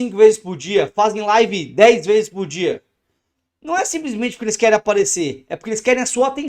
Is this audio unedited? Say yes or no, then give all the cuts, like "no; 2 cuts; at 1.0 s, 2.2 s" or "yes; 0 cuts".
yes; 0 cuts